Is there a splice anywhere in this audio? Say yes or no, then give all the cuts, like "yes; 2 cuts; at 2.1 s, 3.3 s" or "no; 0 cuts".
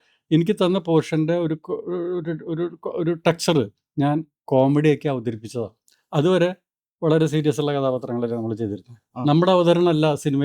yes; 1 cut; at 9.1 s